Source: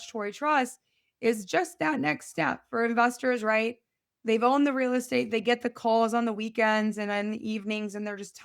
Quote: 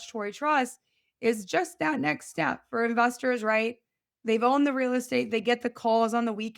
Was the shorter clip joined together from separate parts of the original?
no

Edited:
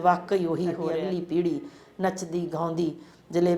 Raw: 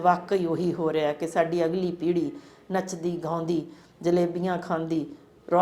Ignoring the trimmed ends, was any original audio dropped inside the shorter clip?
yes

